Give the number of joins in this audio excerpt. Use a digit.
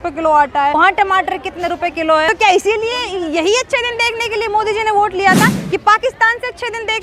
2